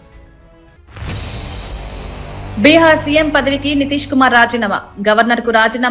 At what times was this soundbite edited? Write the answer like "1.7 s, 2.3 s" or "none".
0.8 s, 2.5 s